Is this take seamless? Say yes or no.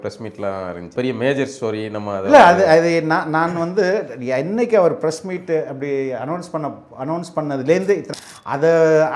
no